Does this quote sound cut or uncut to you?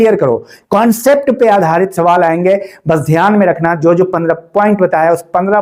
uncut